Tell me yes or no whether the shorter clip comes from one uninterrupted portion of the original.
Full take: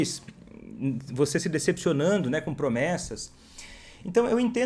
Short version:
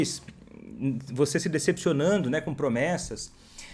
yes